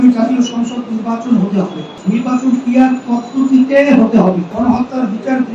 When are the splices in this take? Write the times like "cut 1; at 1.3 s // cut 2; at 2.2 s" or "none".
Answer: cut 1; at 2.0 s // cut 2; at 4.5 s